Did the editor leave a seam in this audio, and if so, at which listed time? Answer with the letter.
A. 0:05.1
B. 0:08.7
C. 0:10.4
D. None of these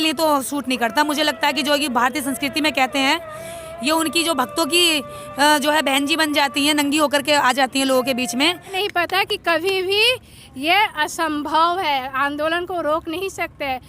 B